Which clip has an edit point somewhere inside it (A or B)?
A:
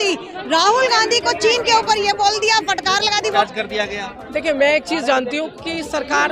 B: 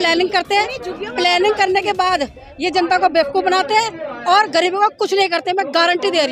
A